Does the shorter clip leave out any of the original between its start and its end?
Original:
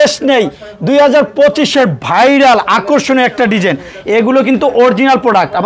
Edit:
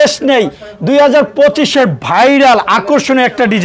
no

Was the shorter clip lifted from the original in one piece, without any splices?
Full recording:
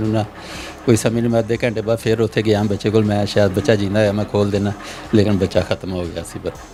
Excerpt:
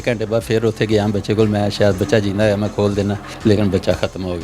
no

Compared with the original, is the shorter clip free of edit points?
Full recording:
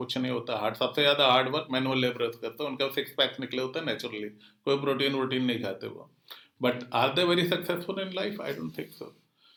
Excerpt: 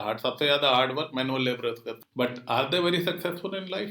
no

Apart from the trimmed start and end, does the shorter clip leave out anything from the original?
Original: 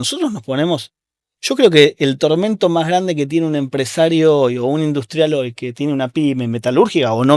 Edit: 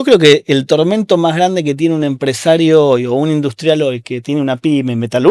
no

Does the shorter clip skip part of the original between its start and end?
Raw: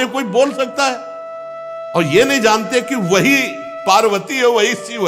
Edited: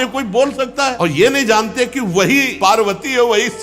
yes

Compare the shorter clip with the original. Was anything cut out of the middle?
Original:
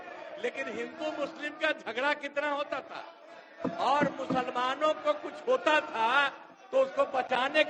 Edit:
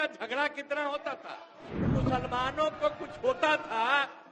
yes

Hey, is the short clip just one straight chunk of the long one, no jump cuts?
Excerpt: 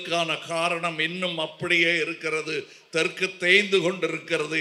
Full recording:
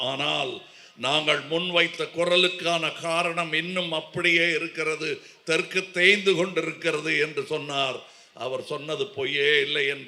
yes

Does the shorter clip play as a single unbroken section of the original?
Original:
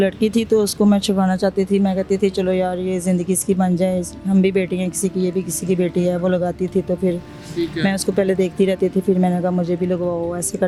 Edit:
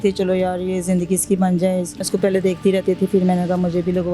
no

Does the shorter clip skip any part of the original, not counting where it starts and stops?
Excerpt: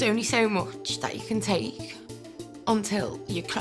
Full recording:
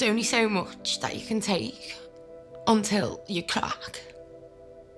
no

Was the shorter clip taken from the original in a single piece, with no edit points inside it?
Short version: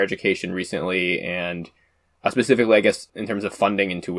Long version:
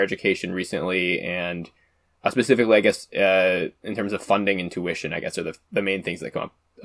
no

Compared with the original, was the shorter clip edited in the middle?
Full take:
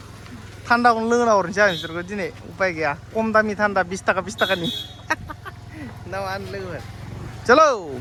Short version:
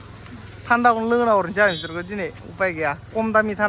no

